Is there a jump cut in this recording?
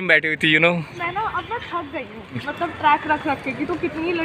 yes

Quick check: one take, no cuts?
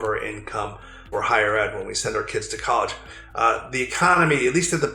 no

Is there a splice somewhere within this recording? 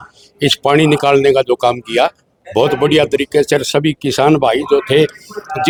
no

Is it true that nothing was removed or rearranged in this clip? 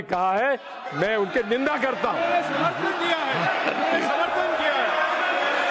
yes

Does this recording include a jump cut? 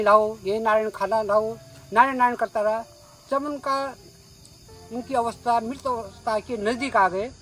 no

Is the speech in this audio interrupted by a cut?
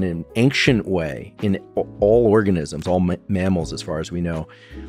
no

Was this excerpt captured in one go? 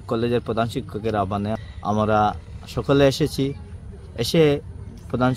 no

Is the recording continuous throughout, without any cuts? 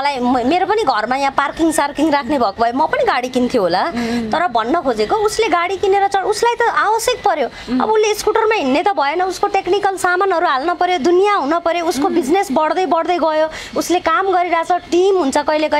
yes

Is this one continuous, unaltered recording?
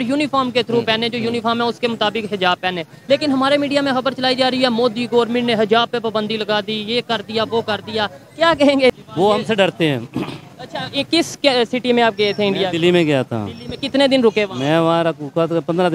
no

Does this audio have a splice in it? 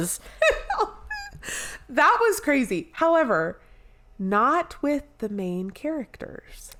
no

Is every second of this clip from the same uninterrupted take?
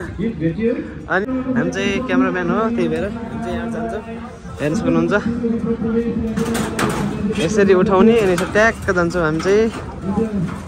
no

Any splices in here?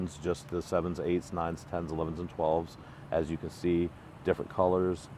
no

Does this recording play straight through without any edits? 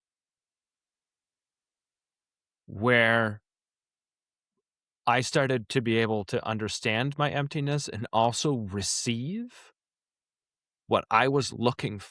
yes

